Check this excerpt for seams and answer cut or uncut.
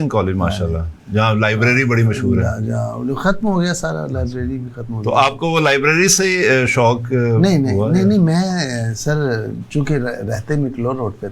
uncut